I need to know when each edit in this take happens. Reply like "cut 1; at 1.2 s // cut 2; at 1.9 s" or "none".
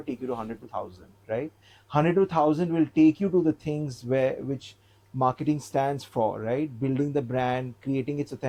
none